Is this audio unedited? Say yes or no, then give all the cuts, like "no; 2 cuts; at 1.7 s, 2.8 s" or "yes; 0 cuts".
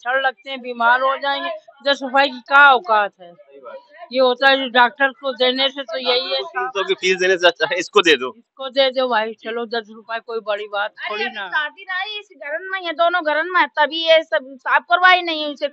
yes; 0 cuts